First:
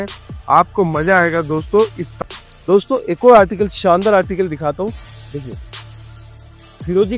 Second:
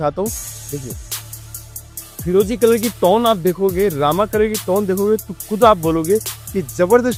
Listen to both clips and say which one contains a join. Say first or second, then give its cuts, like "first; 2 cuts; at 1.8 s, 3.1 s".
first; 1 cut; at 2.1 s